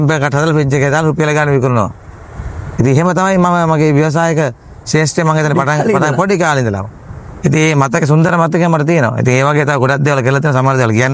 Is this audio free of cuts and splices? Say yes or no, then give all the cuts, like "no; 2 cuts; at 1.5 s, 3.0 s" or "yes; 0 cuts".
yes; 0 cuts